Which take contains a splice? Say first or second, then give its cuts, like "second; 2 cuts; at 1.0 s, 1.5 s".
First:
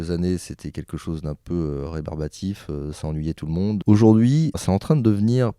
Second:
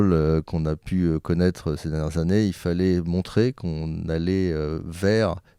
first; 2 cuts; at 3.8 s, 4.6 s